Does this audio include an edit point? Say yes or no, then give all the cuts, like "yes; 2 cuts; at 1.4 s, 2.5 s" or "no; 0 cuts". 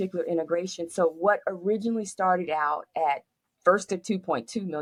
no; 0 cuts